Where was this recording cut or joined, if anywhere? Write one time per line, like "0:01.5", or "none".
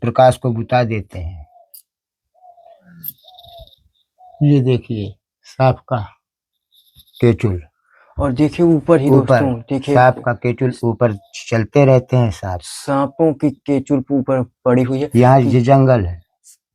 none